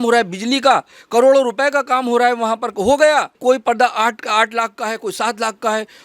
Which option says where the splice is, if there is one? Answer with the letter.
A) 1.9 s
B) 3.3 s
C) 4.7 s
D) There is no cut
B